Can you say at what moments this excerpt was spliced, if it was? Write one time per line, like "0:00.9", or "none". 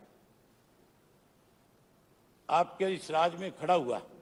none